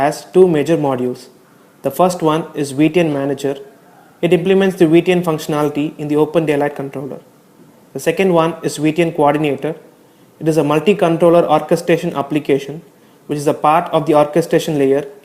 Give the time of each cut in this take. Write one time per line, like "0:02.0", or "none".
0:12.8